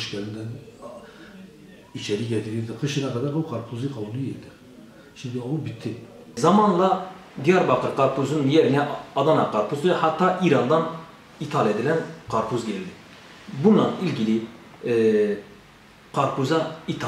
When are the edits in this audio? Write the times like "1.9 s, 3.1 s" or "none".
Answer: 6.4 s